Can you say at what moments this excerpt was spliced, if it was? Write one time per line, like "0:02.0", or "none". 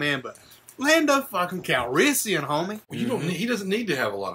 0:02.8